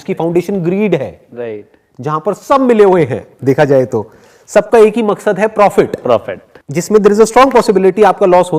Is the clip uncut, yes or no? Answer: no